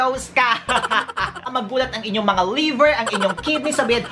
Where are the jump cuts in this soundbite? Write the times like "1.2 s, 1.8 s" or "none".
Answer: 1.5 s